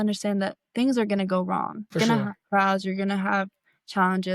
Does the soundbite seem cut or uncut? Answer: cut